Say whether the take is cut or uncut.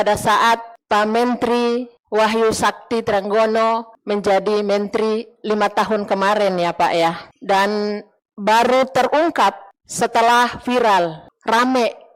uncut